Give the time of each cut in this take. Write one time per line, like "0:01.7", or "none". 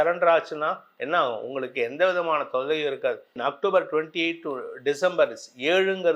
0:03.4